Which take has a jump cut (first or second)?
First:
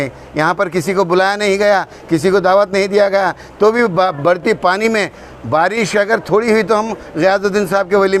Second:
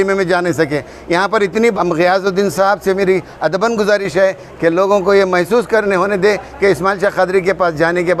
second